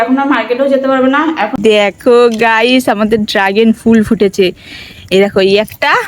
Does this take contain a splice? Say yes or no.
yes